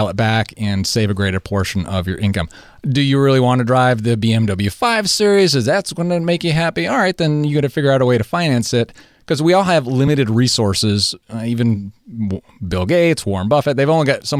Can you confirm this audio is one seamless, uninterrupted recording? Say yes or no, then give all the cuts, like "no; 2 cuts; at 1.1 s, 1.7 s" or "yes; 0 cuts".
yes; 0 cuts